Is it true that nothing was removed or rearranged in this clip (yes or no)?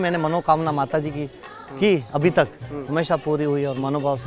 yes